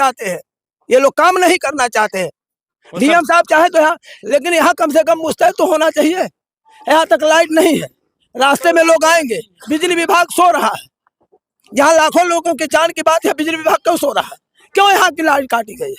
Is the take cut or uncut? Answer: cut